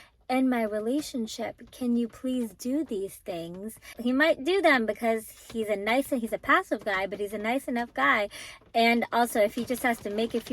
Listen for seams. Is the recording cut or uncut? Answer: cut